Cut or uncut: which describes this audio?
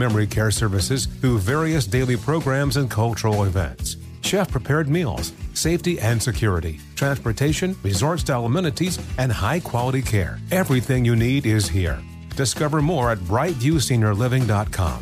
uncut